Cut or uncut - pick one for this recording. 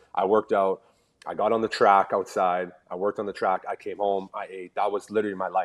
uncut